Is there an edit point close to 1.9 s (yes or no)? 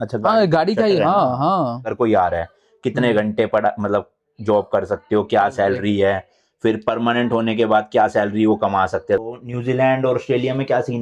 yes